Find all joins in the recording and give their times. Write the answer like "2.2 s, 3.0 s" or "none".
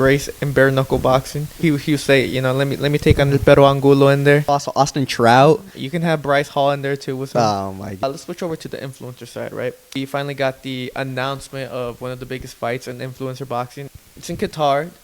1.5 s, 4.5 s, 8.0 s, 10.0 s, 13.9 s